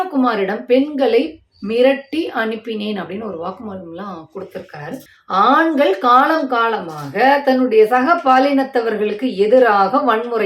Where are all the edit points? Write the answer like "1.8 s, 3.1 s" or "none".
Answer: 5.1 s